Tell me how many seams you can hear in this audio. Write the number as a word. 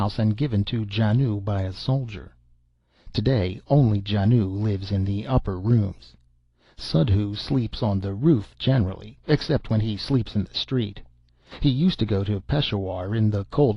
one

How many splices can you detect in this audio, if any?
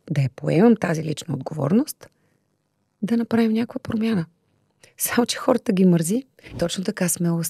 one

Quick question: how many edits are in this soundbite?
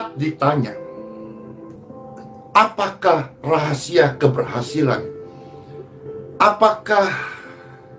one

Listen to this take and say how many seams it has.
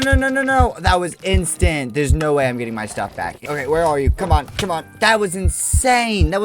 one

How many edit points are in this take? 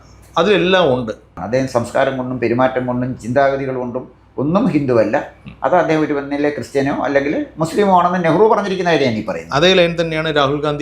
one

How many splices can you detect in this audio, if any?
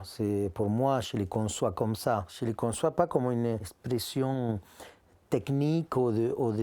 two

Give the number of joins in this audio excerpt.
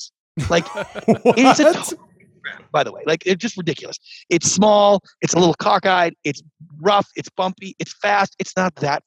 zero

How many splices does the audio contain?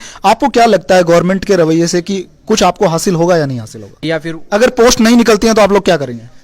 one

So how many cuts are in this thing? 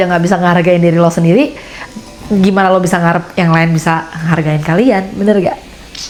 zero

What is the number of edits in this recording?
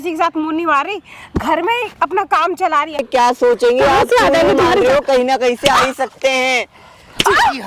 one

